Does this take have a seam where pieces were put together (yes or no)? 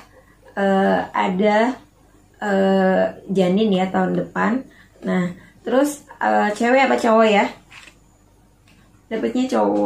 no